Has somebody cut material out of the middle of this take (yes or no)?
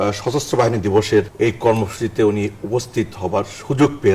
yes